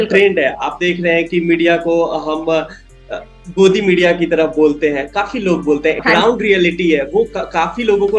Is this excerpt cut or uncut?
cut